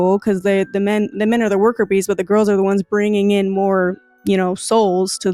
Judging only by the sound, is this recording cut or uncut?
uncut